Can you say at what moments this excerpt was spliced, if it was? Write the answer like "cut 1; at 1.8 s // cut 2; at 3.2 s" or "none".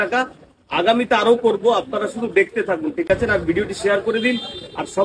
none